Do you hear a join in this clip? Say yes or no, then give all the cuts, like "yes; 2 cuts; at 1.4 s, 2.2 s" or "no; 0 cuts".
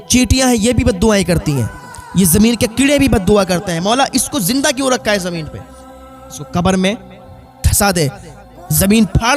no; 0 cuts